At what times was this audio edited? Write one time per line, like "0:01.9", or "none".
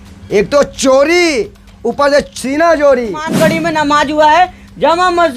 0:03.2